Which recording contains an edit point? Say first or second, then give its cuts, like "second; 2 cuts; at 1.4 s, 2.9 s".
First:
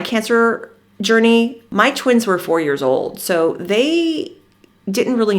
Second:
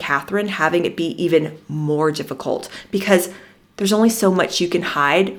first; 1 cut; at 1.6 s